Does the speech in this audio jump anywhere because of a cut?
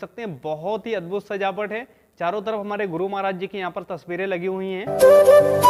no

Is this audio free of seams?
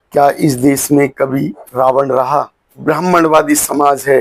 no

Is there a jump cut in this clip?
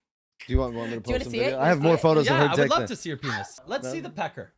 yes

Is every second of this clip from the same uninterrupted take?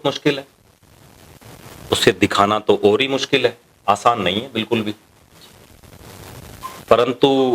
yes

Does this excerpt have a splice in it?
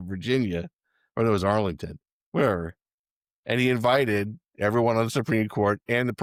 no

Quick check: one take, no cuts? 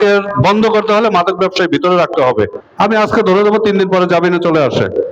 no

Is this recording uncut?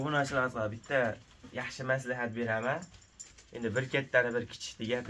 yes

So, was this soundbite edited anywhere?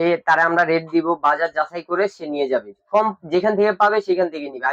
no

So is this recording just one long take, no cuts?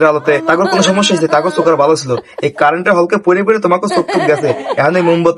yes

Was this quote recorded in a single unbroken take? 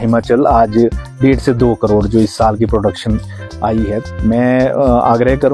no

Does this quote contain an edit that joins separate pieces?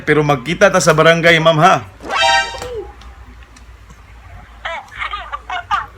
no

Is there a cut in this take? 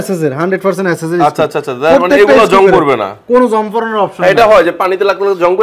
no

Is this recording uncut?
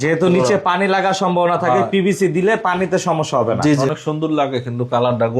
no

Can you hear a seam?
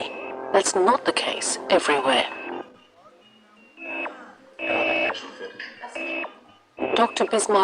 yes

